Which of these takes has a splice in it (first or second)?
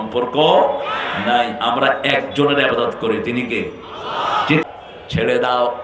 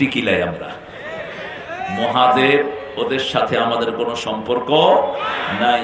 first